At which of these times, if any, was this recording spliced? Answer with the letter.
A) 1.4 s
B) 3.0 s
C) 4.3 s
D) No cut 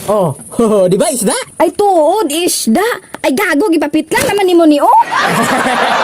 A